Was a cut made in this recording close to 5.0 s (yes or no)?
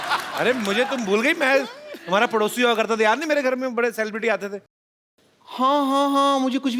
yes